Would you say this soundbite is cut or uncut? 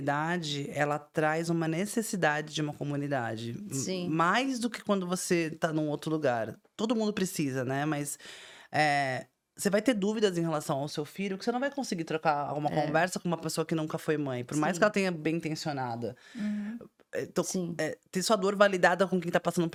uncut